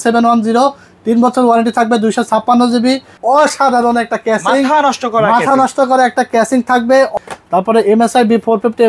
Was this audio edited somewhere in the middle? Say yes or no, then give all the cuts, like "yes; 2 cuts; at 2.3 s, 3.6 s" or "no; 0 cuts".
yes; 2 cuts; at 3.1 s, 7.1 s